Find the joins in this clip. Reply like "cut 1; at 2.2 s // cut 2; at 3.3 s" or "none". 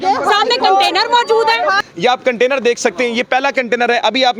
cut 1; at 1.8 s